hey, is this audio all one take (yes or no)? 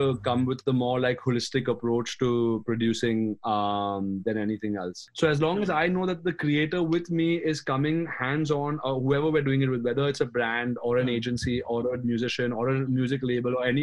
no